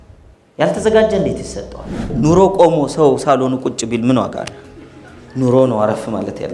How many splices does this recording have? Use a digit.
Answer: 1